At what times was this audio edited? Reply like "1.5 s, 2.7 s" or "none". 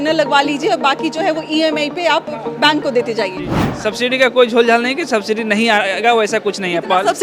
3.7 s